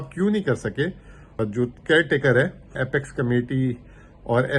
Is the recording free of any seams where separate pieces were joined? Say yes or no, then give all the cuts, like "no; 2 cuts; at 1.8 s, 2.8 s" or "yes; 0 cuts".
no; 2 cuts; at 1.3 s, 2.8 s